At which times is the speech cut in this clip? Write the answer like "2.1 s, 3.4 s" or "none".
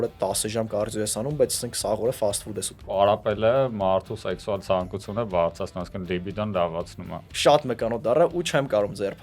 2.8 s, 7.2 s